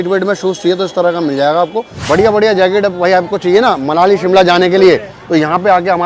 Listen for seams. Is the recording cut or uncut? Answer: cut